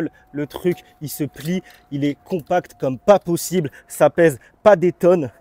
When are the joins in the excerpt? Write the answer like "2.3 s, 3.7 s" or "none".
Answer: none